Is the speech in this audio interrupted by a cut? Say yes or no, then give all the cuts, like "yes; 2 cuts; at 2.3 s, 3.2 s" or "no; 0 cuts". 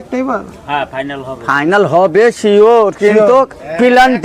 no; 0 cuts